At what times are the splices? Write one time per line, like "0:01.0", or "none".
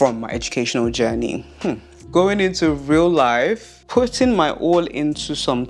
0:01.9
0:03.7